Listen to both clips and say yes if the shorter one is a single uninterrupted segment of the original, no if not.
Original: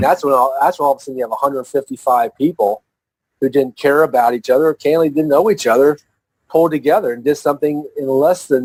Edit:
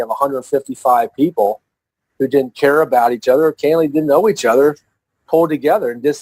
yes